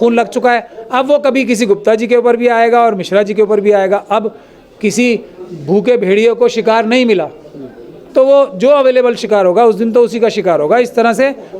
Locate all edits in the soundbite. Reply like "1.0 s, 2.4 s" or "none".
none